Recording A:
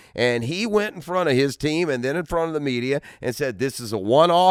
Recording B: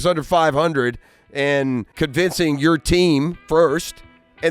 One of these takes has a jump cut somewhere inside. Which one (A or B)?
B